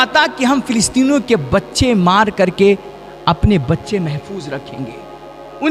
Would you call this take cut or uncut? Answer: uncut